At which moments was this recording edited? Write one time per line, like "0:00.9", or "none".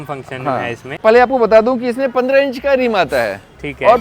0:00.9